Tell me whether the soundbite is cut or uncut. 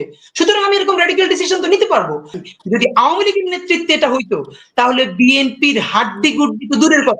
cut